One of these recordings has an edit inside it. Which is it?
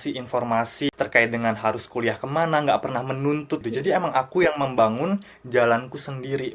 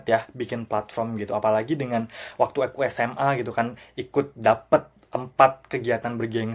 first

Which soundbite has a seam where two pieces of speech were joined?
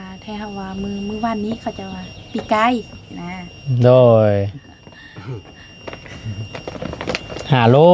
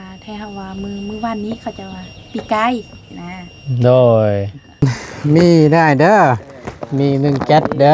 second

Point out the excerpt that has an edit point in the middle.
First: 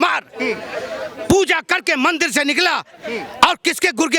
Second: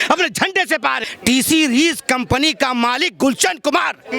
second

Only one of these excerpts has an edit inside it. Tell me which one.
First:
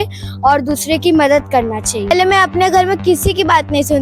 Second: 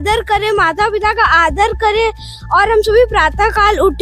first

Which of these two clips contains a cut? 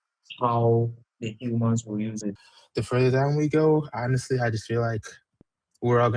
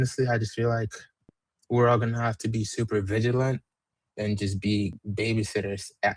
first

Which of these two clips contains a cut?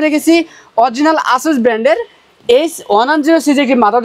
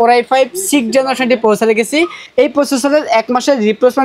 second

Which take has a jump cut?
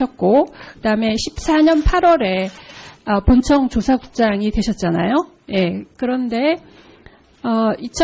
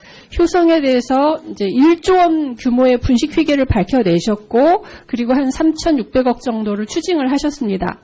second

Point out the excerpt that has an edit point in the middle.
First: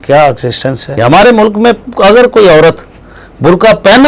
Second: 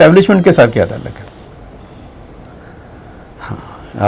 first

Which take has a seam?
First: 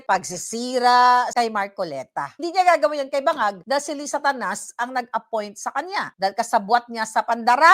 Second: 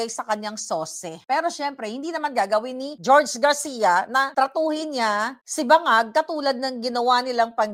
first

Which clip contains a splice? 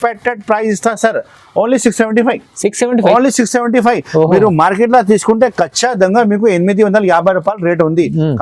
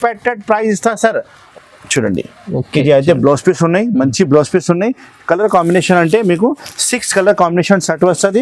second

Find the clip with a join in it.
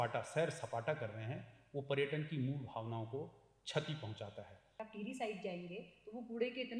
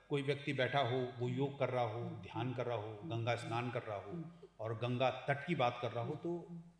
first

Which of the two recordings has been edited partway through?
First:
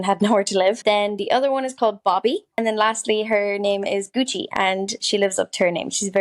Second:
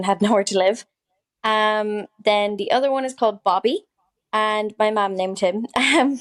first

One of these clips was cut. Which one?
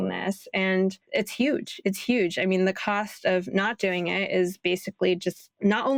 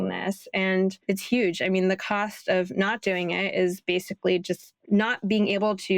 second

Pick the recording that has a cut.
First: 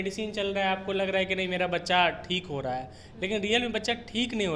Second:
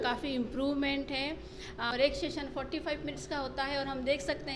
second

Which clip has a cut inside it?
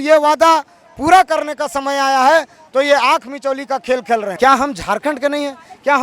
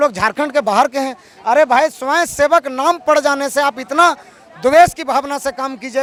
first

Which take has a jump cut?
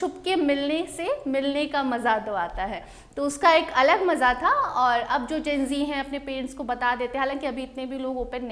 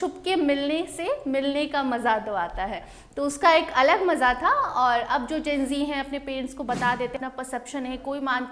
second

